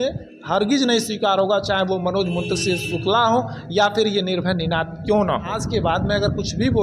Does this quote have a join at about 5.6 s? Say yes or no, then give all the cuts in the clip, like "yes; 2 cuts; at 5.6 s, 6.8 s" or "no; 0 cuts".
yes; 1 cut; at 5.6 s